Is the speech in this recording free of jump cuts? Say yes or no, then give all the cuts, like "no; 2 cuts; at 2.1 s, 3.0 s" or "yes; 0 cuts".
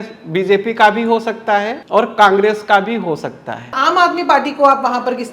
no; 2 cuts; at 1.8 s, 3.8 s